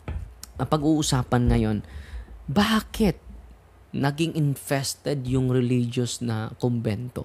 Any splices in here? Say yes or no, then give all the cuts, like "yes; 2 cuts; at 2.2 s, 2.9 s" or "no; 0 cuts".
no; 0 cuts